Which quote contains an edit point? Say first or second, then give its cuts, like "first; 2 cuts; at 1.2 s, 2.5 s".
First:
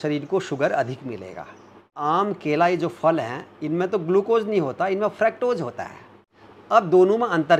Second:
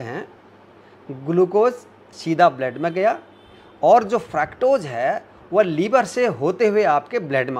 first; 1 cut; at 1.9 s